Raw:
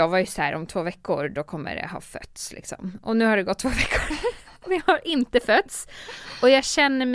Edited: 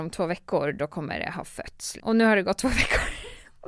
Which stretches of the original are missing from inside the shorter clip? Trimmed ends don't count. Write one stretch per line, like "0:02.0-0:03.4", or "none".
0:02.5-0:03.0